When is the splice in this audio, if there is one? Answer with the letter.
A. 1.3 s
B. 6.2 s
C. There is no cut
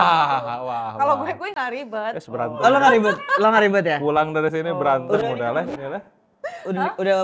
C